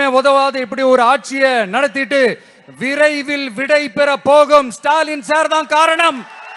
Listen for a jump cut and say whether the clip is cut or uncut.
uncut